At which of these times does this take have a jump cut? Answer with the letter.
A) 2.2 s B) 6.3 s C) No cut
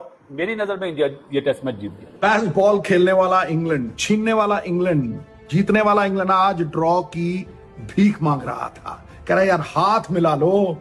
A